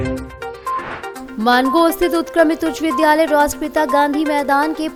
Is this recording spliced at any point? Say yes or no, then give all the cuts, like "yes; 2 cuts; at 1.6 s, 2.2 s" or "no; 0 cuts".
no; 0 cuts